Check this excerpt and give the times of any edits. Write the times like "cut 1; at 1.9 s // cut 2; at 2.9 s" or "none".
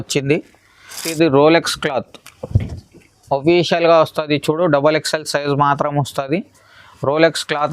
cut 1; at 1.0 s

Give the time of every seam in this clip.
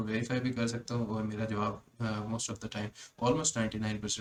none

